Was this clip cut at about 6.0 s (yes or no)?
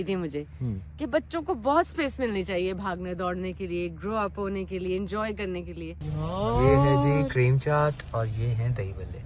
yes